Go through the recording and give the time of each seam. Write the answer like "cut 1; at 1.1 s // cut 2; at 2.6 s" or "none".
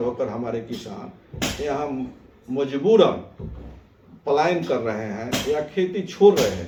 none